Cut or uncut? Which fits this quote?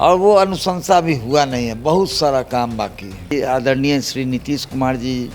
cut